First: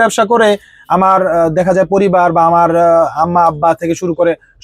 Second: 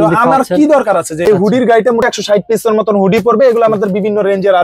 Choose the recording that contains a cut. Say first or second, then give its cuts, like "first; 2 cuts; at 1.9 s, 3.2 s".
second; 2 cuts; at 1.3 s, 2.1 s